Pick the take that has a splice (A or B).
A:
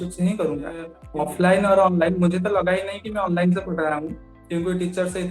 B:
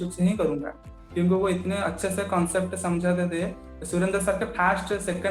A